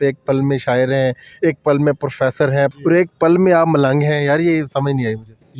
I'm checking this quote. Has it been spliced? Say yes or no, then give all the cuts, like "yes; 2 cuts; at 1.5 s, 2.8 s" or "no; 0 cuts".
yes; 1 cut; at 2.7 s